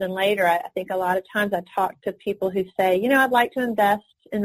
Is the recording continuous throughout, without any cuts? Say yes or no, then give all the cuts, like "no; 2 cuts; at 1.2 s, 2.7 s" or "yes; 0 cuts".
yes; 0 cuts